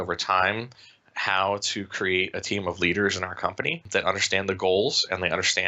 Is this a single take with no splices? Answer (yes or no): no